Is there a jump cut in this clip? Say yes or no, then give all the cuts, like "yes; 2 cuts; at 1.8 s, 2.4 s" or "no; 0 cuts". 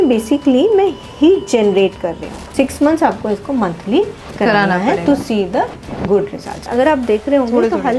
yes; 2 cuts; at 2.5 s, 6.6 s